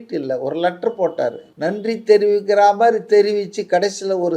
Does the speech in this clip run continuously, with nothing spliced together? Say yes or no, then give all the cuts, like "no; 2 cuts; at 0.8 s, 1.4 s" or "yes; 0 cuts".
no; 1 cut; at 1.5 s